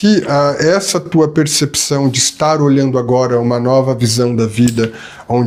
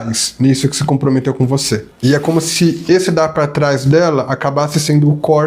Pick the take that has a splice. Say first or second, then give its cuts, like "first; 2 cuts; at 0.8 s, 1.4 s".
second; 1 cut; at 1.9 s